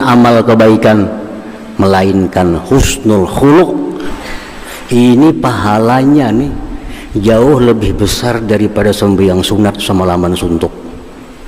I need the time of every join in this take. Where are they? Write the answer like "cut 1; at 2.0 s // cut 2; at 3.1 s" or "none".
cut 1; at 4.1 s